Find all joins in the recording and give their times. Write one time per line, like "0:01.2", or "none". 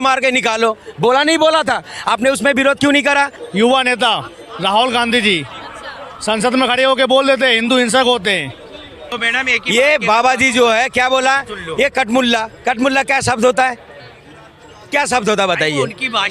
0:03.4
0:09.1